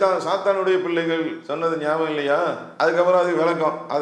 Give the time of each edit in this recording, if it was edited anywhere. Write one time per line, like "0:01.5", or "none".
0:01.4
0:02.6

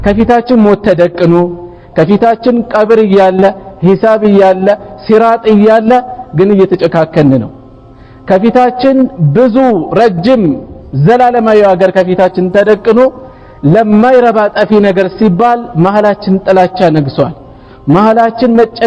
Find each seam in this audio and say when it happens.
none

